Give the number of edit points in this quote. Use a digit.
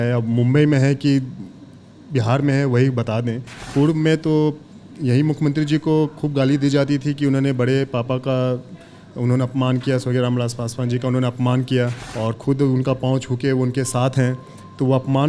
2